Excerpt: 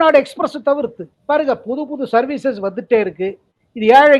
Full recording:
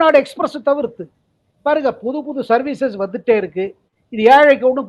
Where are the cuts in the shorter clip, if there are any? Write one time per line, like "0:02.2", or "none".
0:01.1

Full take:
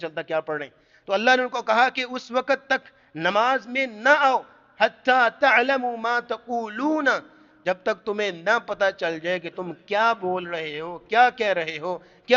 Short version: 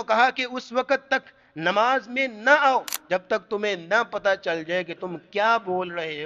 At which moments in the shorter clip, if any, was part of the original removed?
0:03.0

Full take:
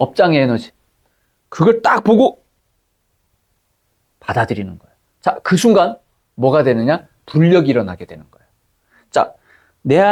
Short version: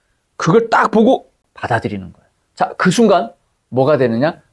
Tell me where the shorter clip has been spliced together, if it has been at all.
0:01.4

